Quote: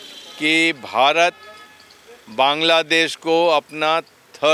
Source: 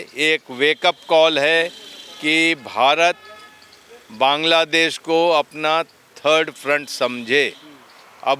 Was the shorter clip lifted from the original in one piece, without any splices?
yes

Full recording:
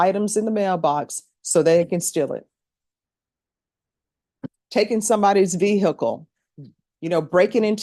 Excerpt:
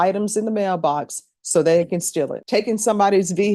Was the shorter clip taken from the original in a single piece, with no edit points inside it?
no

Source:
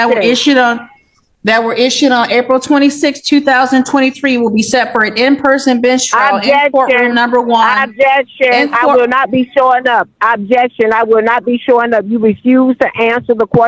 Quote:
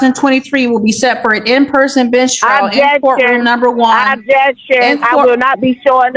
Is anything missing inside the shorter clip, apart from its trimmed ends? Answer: no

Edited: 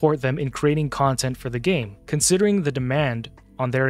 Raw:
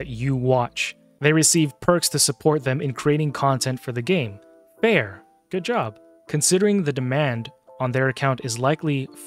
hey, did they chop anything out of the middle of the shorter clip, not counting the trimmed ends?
yes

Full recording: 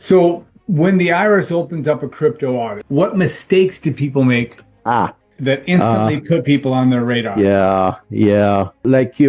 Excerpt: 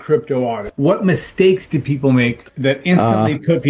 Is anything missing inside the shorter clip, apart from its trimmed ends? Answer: yes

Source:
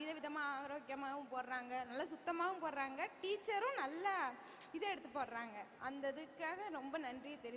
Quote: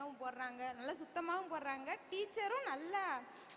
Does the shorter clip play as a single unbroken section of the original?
yes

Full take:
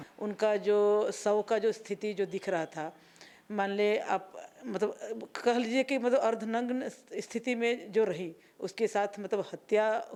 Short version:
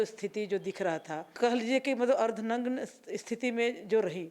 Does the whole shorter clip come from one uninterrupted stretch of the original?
no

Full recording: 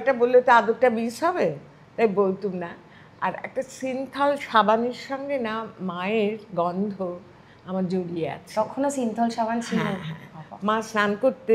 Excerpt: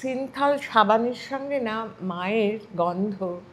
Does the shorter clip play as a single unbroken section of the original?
yes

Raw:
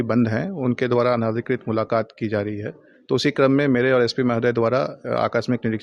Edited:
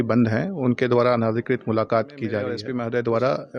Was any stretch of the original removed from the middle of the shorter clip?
yes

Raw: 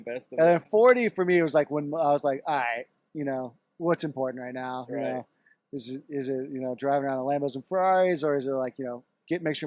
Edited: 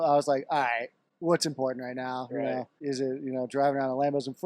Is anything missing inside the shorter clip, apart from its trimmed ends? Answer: yes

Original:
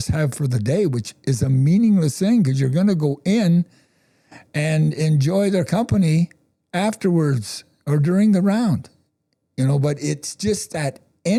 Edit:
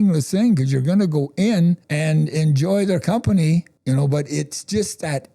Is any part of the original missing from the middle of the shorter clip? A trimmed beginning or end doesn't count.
yes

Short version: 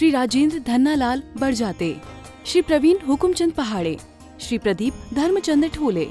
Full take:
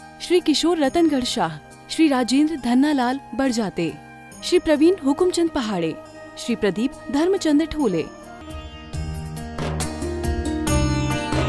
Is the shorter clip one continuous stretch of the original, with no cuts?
yes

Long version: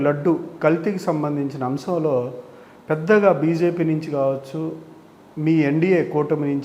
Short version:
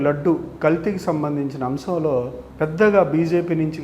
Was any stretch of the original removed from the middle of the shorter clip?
yes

